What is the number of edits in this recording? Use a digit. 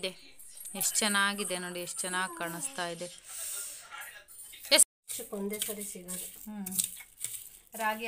1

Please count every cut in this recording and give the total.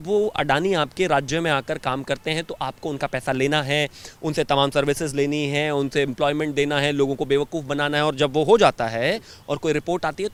0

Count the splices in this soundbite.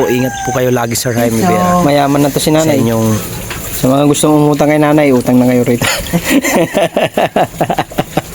2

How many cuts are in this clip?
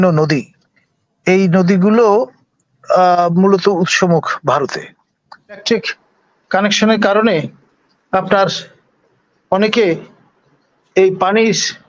1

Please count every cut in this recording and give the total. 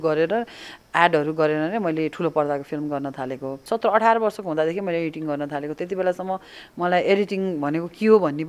1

